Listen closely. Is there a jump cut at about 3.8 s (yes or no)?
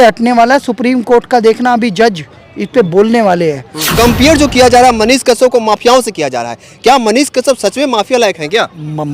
yes